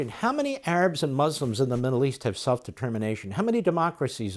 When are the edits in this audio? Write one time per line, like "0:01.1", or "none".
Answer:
none